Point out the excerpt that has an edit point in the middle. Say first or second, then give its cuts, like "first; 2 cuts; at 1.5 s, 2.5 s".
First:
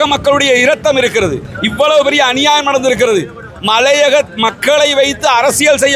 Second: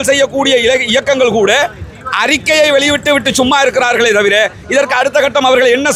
first; 1 cut; at 1.5 s